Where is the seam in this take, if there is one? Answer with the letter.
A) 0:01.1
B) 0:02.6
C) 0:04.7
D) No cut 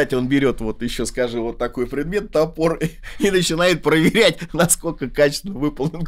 D